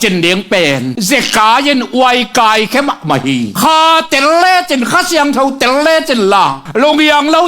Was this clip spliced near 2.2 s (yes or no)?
no